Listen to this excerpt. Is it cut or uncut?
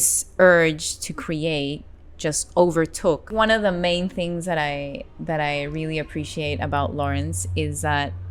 cut